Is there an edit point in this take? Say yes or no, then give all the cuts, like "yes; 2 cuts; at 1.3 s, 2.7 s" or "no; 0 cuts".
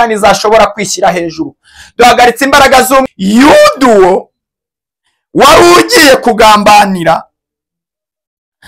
yes; 1 cut; at 3.0 s